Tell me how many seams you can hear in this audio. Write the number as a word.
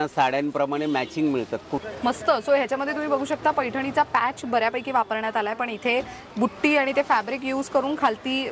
one